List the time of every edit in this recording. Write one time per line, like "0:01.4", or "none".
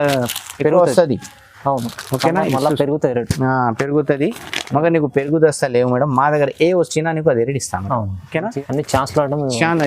0:08.5